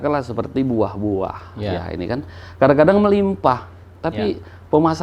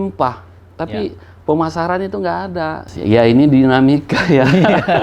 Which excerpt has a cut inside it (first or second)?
second